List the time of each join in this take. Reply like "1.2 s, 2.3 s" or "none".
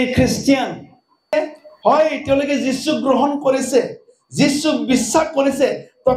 1.3 s